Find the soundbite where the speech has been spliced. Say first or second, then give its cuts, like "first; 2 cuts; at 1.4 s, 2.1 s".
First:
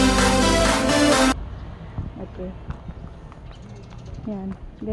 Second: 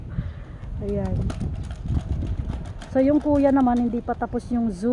first; 1 cut; at 1.3 s